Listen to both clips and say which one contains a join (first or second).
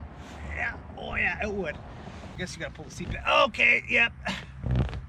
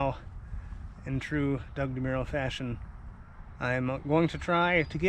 first